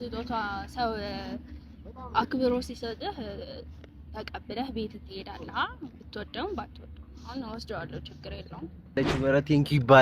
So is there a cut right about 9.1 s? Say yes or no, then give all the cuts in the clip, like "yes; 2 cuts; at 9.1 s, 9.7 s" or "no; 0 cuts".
yes; 1 cut; at 9.1 s